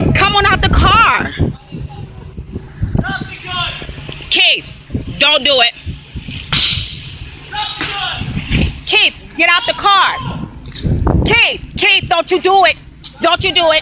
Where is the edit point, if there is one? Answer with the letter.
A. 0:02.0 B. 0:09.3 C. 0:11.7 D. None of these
A